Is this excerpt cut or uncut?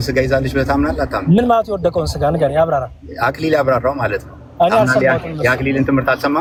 uncut